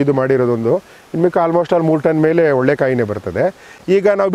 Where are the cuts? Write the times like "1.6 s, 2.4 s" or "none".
none

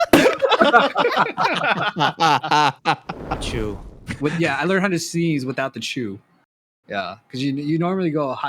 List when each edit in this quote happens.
3.4 s

